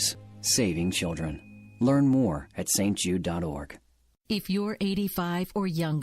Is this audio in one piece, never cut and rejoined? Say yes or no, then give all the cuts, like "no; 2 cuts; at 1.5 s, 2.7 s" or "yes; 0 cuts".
no; 1 cut; at 3.8 s